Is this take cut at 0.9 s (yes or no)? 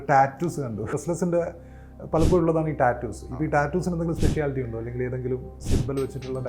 yes